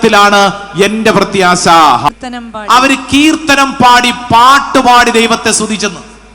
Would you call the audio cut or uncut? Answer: cut